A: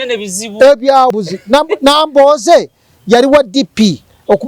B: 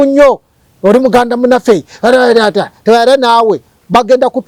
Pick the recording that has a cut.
A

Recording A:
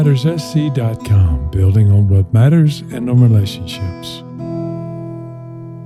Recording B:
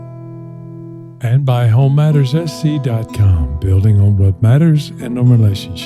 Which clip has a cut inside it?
B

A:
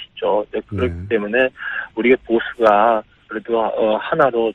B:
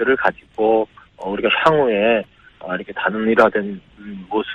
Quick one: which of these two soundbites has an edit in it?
A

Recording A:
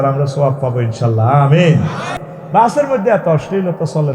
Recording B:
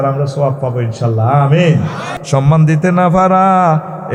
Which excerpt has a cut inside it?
A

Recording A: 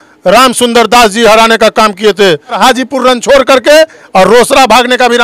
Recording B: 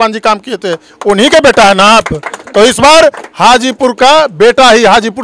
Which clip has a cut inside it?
A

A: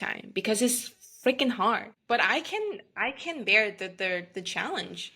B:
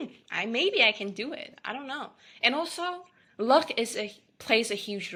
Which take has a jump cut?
A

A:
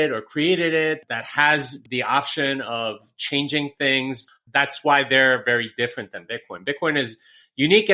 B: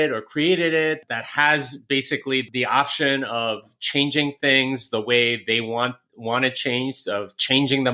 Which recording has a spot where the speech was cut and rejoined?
A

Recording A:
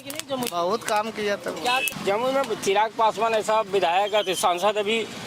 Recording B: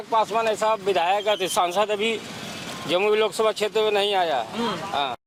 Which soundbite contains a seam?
A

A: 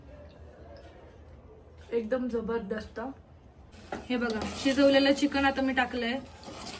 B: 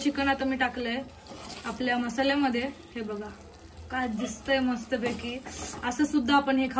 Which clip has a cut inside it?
A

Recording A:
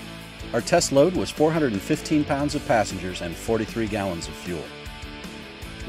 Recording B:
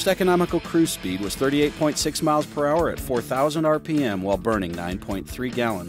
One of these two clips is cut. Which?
A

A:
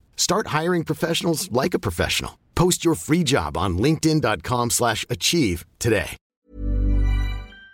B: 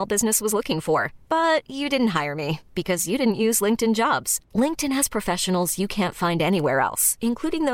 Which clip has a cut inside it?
A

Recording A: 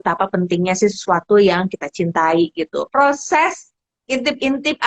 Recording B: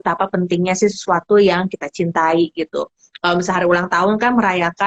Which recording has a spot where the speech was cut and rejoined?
A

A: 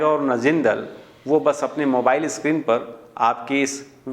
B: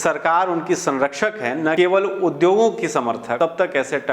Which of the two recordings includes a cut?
B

